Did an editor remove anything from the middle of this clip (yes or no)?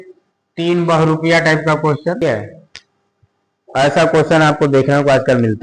yes